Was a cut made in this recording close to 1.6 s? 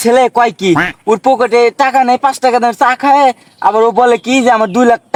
no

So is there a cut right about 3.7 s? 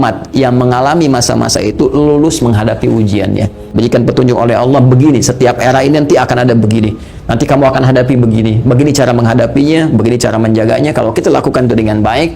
yes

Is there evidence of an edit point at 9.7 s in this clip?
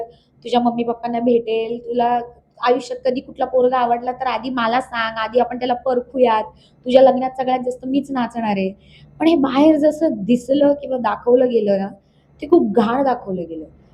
no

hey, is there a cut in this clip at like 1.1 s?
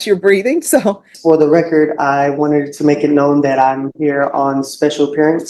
yes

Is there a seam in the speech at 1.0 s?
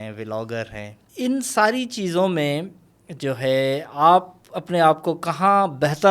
yes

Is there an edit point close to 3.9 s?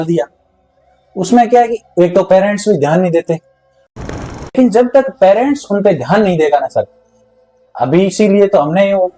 yes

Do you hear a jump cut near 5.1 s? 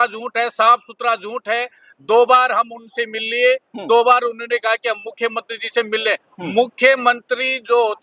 no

